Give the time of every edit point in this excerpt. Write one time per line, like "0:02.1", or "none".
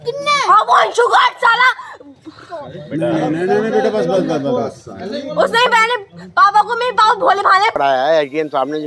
0:07.7